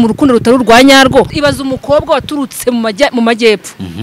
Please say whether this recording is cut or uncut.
cut